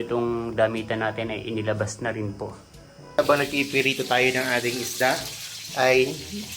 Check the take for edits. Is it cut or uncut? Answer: cut